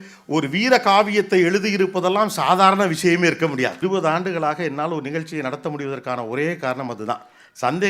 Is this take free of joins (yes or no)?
no